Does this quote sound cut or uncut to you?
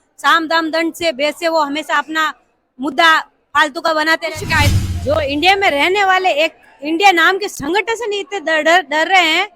cut